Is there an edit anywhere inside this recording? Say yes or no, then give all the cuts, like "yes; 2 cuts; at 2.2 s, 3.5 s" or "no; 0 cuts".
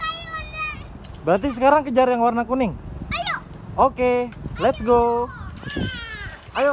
yes; 1 cut; at 5.5 s